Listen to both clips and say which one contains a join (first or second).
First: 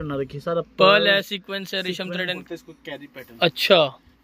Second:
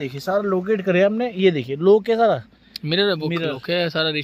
first